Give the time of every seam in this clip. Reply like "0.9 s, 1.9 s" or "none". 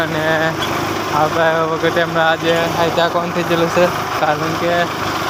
none